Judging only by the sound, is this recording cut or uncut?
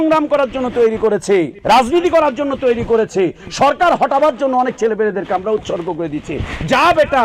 cut